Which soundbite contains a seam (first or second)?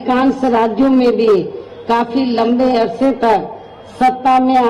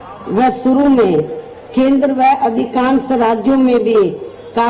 second